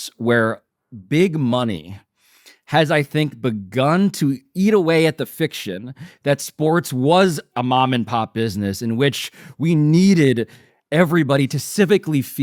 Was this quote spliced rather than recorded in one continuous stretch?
no; 0 cuts

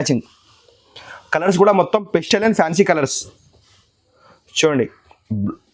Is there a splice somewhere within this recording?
no; 0 cuts

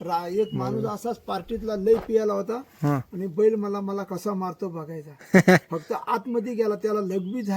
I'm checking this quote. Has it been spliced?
no; 0 cuts

